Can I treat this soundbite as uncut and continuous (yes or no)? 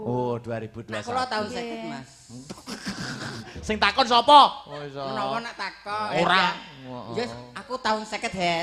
yes